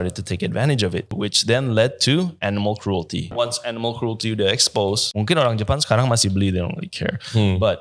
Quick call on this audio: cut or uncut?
cut